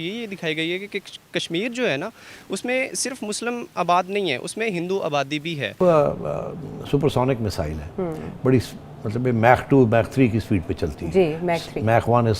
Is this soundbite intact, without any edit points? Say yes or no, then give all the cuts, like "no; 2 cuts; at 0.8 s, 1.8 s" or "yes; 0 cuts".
no; 1 cut; at 5.8 s